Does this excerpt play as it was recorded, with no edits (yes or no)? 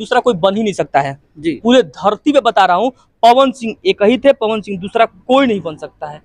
yes